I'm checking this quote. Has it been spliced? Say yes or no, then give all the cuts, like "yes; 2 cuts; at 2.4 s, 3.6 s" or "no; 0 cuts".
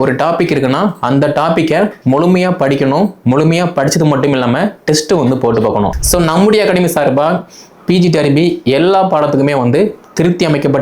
yes; 1 cut; at 5.9 s